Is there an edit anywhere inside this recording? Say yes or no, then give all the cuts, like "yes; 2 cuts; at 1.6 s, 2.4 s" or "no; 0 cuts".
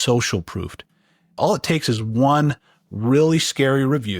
yes; 1 cut; at 1.2 s